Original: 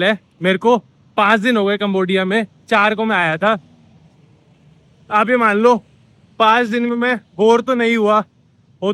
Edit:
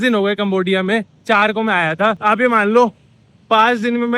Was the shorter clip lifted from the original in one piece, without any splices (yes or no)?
no